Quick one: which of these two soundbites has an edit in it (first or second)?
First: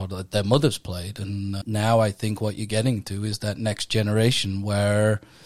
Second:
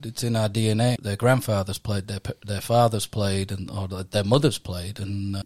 second